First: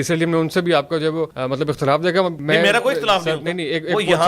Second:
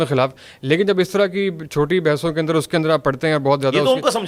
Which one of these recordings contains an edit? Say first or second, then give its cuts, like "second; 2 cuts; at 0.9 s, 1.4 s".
first; 2 cuts; at 1.4 s, 2.4 s